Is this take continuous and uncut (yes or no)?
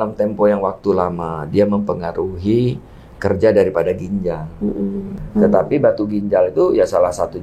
no